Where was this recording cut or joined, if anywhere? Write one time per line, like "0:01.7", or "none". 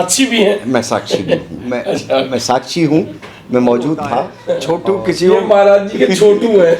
0:04.4